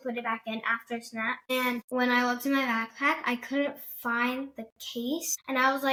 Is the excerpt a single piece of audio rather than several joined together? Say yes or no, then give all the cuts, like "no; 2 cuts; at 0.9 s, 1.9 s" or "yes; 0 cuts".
yes; 0 cuts